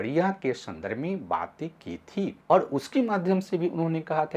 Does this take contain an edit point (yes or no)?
yes